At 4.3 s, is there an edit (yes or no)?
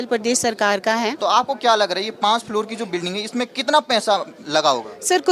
no